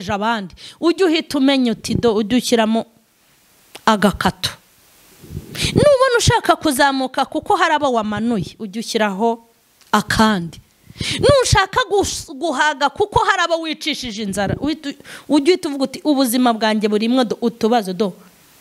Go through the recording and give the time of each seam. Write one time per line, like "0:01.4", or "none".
none